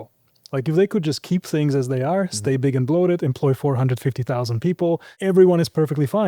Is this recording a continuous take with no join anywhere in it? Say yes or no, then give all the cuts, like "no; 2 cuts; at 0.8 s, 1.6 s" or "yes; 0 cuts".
no; 1 cut; at 5.1 s